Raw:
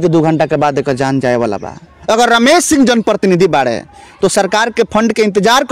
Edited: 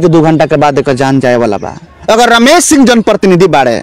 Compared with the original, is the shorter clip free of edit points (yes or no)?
yes